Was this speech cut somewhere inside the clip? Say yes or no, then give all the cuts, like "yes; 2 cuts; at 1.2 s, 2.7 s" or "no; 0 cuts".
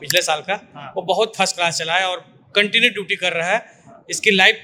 no; 0 cuts